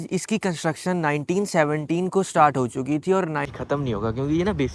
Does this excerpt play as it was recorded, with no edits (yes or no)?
no